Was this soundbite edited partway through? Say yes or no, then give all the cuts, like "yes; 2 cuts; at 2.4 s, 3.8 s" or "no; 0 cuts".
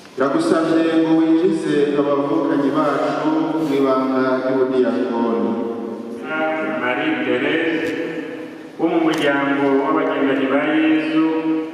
yes; 1 cut; at 6.2 s